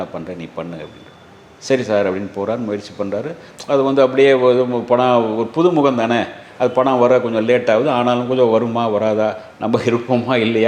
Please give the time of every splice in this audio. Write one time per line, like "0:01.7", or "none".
none